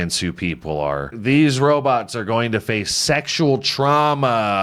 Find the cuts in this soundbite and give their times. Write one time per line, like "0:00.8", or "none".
0:01.1